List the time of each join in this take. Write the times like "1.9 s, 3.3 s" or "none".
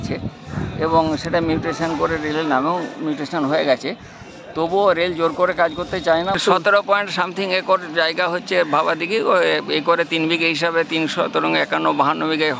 6.4 s

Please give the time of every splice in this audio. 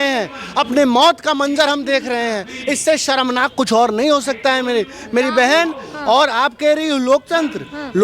none

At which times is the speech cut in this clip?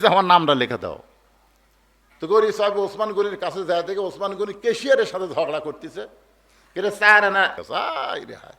7.6 s

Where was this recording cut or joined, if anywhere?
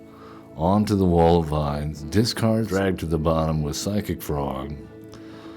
1.9 s, 2.7 s

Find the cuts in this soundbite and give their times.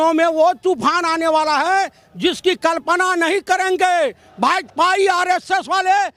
none

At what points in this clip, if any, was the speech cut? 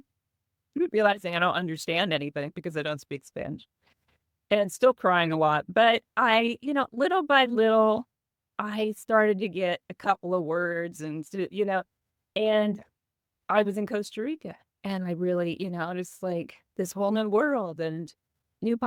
none

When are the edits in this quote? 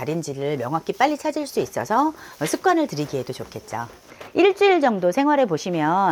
4.0 s

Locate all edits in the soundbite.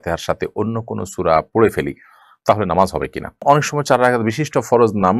3.4 s

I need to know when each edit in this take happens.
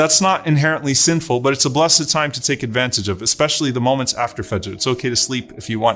none

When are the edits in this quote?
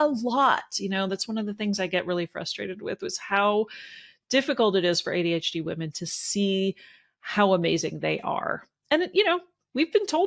none

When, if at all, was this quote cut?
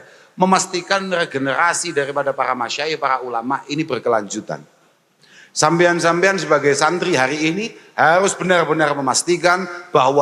none

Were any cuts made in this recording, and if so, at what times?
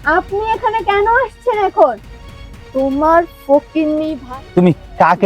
4.1 s

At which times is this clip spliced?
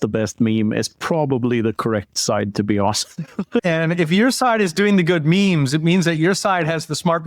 3.6 s

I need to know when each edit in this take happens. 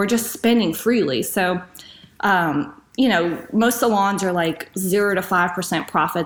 none

